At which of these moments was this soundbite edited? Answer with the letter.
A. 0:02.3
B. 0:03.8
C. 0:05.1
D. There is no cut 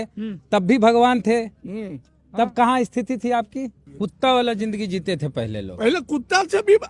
B